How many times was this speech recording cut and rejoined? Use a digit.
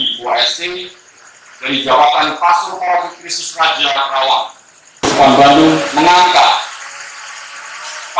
1